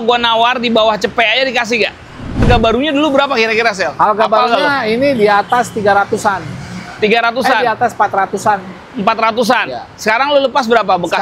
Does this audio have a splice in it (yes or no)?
yes